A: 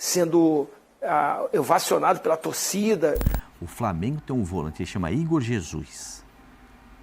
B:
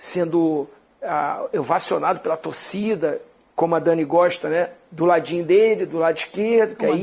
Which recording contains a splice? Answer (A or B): A